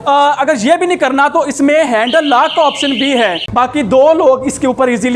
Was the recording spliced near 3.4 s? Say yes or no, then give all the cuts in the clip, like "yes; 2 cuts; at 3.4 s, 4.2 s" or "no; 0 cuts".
yes; 1 cut; at 3.4 s